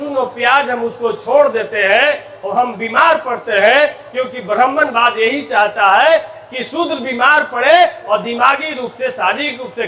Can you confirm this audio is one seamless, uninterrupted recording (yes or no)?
yes